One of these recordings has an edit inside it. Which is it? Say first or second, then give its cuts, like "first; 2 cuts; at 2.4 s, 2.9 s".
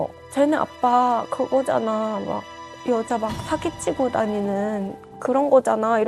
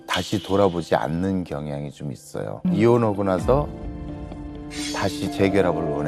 second; 1 cut; at 2.6 s